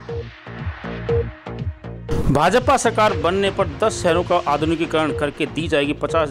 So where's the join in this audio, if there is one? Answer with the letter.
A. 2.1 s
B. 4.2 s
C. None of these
A